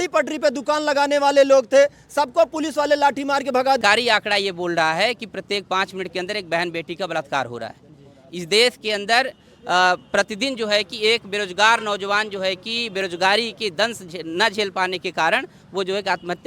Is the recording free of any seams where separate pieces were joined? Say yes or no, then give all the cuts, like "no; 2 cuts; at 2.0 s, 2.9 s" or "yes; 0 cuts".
no; 1 cut; at 3.8 s